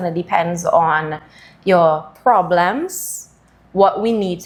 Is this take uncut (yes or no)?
yes